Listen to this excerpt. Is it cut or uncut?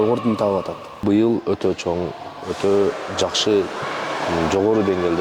cut